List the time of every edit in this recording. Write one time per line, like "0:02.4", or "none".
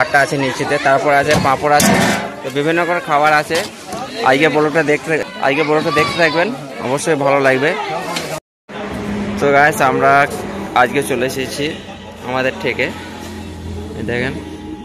0:08.3